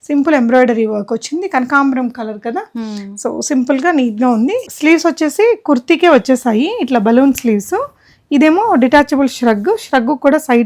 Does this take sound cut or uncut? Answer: cut